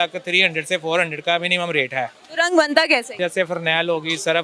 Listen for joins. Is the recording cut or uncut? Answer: cut